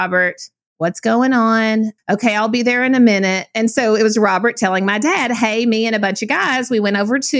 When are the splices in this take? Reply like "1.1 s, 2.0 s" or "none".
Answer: 2.0 s